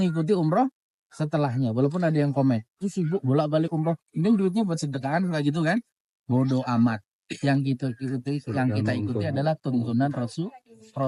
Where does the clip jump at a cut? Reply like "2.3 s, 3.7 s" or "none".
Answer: none